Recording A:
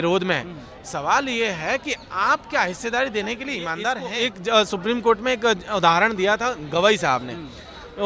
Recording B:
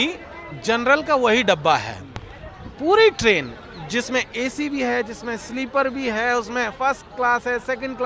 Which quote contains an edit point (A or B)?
A